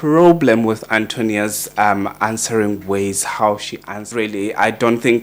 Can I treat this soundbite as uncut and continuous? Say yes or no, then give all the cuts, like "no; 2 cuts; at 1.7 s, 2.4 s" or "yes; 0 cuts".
no; 1 cut; at 4.1 s